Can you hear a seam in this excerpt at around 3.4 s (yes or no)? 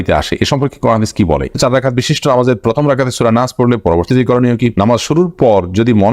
no